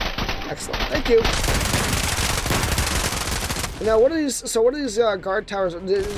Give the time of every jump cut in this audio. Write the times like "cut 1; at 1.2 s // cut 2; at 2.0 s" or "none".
cut 1; at 3.7 s